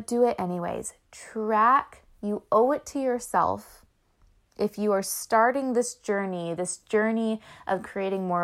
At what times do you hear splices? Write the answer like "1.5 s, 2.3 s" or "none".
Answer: none

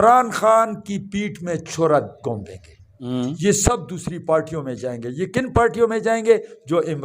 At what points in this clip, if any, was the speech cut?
3.0 s

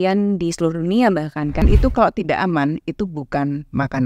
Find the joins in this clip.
1.6 s

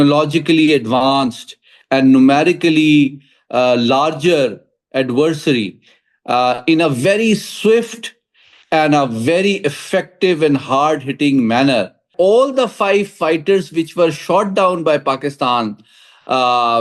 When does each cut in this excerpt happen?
12.1 s

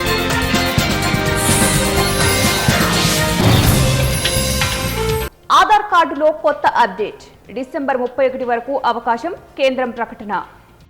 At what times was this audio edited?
5.4 s

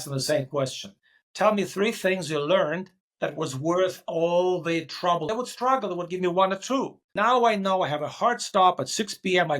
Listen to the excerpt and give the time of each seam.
5.3 s, 7.0 s

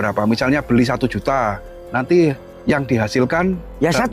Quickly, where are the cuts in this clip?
2.5 s

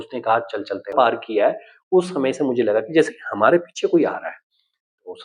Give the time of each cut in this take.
0.9 s

